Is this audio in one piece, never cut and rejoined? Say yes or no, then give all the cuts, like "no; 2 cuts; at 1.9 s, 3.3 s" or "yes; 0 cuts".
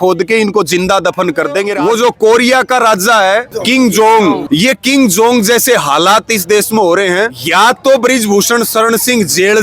no; 2 cuts; at 1.7 s, 7.3 s